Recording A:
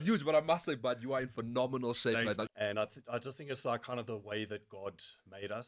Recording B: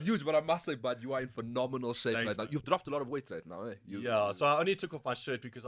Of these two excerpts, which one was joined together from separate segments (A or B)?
A